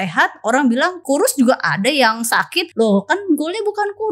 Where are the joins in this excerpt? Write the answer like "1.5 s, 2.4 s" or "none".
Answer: 1.0 s, 2.6 s